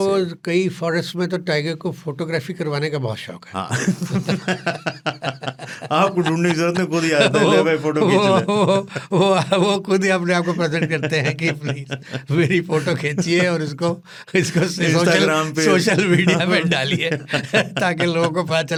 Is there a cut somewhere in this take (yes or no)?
no